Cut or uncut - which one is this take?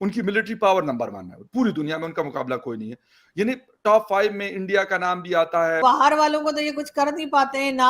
cut